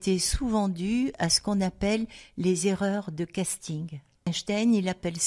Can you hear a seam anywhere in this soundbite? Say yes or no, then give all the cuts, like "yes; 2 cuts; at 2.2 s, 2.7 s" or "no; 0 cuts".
yes; 1 cut; at 4.3 s